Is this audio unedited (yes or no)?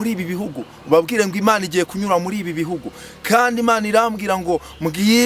yes